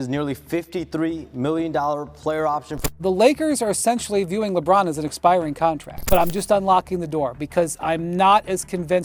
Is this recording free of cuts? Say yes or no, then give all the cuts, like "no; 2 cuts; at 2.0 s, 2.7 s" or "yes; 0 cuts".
no; 2 cuts; at 2.9 s, 5.9 s